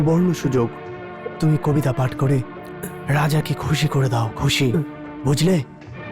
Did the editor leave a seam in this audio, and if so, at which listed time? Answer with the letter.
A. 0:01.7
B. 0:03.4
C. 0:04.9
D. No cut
D